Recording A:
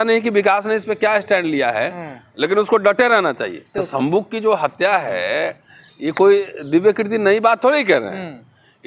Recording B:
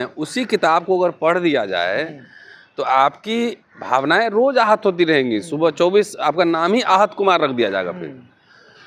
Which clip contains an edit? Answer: A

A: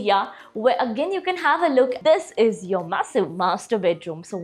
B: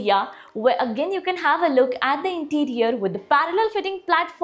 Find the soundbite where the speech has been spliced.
A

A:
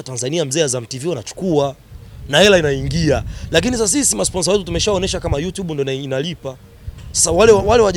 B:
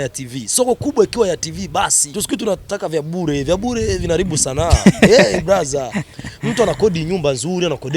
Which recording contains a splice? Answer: B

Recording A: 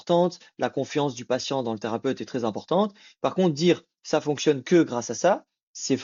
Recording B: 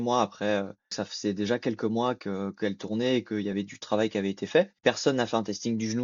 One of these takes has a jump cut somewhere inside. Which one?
B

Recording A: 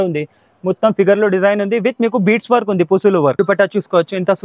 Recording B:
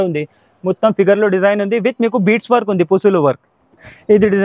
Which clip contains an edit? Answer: A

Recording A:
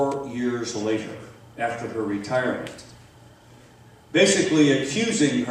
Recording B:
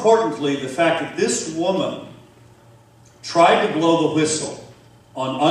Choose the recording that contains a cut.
B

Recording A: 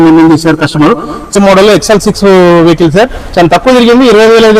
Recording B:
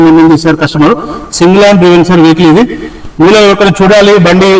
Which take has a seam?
A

